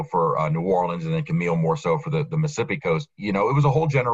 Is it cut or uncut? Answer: cut